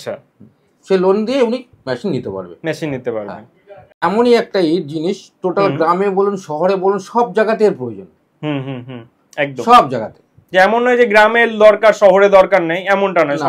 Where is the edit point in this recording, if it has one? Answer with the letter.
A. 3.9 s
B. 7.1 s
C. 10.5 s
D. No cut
A